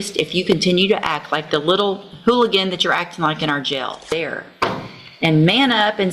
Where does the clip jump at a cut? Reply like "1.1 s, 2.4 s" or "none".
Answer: 4.1 s